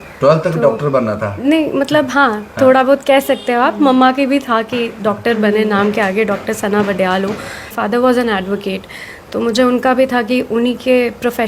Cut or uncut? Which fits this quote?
cut